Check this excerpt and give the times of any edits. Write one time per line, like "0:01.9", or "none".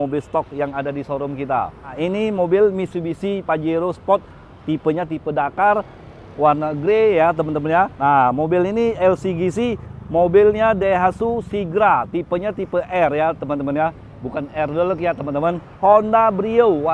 0:01.9
0:07.9
0:15.7

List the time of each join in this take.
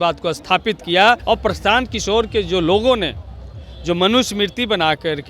0:01.2

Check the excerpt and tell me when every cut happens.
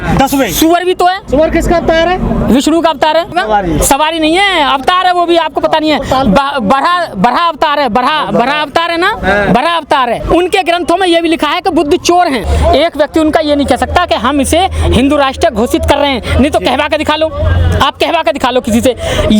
0:01.2
0:03.3
0:10.2
0:12.5

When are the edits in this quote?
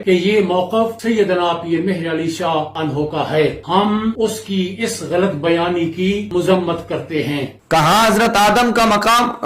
0:07.5

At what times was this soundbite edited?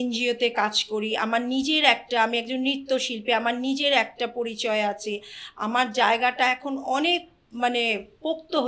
none

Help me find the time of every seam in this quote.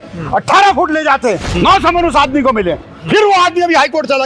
0:01.5

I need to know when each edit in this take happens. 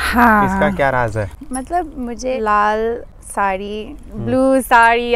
0:01.4
0:02.3
0:03.2

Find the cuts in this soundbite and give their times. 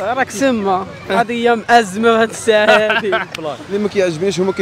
0:03.6

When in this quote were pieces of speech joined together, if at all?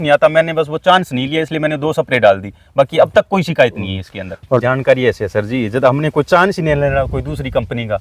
0:04.6

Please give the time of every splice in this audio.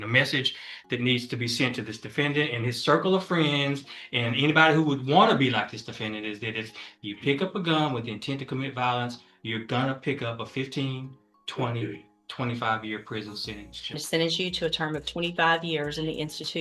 0:14.0

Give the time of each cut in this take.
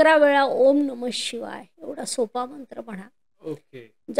none

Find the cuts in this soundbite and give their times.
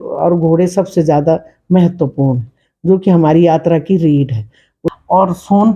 0:04.8

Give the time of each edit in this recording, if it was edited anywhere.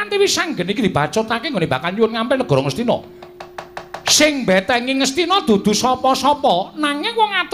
0:01.4

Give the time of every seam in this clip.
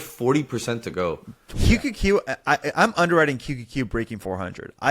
0:01.4

